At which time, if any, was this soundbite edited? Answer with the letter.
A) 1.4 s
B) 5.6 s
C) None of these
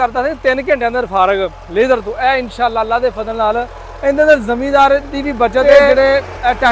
B